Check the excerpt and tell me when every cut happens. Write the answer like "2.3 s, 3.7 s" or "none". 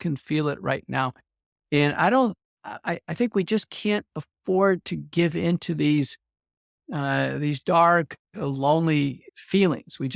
none